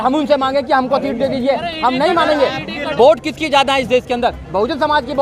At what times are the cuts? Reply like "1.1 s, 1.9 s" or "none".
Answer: 2.8 s